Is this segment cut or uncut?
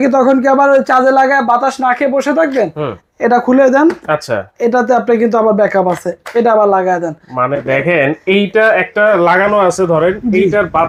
uncut